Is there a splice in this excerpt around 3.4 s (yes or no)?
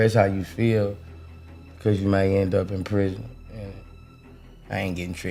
no